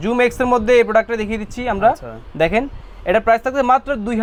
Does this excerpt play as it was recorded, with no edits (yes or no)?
yes